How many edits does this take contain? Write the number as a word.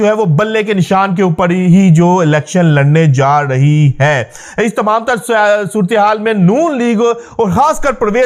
zero